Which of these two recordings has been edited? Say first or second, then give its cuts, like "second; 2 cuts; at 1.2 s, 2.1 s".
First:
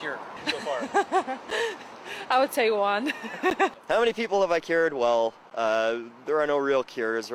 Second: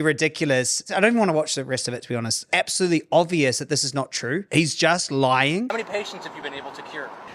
second; 4 cuts; at 0.9 s, 2.4 s, 4.5 s, 5.7 s